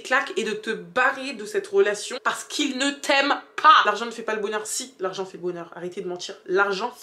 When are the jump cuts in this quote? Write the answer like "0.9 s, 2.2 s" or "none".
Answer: 2.1 s, 3.9 s